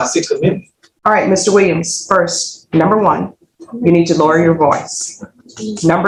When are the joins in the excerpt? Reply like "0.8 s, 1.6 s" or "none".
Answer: none